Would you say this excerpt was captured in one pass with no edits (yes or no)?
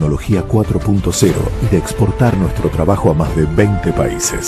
yes